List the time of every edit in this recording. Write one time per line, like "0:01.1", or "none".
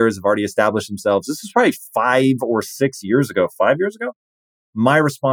none